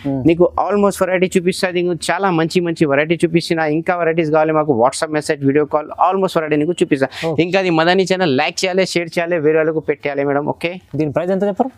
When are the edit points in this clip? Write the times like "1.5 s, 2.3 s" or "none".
none